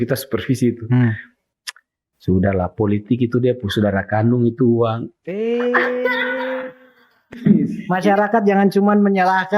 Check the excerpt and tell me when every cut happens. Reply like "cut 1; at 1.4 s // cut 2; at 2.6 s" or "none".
cut 1; at 7.8 s